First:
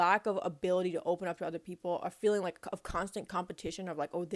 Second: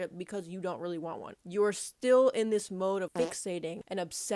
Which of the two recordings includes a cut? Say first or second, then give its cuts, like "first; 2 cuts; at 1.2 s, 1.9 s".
second; 2 cuts; at 1.4 s, 3.5 s